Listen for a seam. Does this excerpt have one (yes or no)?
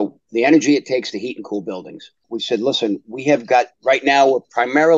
yes